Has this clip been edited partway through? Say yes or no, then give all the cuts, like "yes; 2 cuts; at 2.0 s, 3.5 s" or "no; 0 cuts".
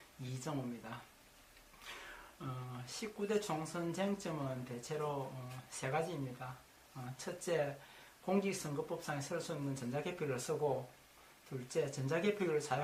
no; 0 cuts